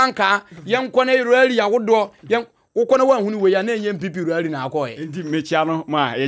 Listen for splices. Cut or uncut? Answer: uncut